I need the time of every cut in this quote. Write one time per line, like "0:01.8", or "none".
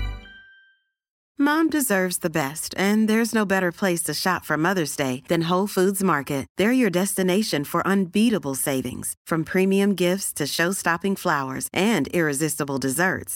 0:01.1